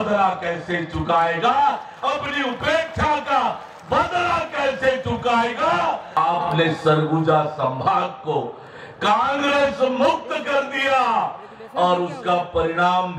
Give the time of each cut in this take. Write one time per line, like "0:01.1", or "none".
0:06.2